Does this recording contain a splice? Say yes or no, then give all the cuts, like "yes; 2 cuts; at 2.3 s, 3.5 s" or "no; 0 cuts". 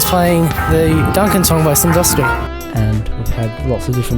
yes; 1 cut; at 2.4 s